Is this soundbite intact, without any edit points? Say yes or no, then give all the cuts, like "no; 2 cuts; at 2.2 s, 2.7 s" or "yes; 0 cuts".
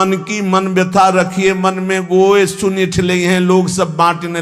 yes; 0 cuts